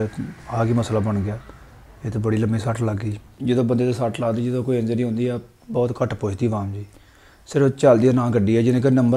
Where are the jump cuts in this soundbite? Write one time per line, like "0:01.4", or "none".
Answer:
0:03.4